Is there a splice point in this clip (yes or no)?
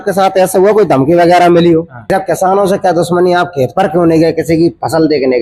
yes